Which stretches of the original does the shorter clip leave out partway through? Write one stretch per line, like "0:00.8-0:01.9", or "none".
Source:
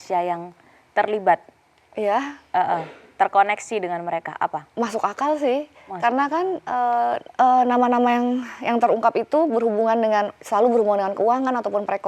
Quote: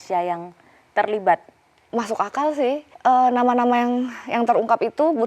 0:01.8-0:04.6
0:05.8-0:07.2